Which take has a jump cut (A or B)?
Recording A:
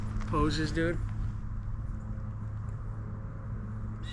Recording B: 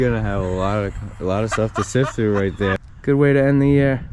B